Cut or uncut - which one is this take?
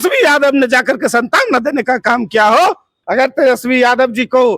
cut